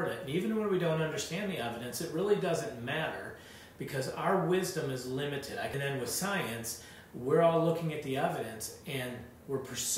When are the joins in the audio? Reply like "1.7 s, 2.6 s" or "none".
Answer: 5.7 s